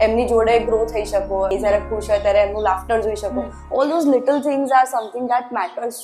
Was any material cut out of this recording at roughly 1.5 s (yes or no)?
yes